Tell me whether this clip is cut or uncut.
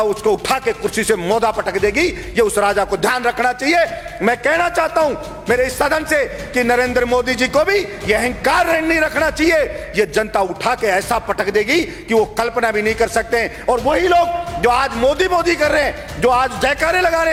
uncut